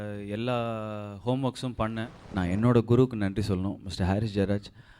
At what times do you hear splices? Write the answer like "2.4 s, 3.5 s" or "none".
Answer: 2.2 s